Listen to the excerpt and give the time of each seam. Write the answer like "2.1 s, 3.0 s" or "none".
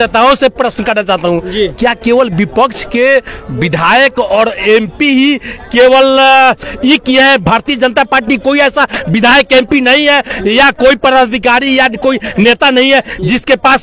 none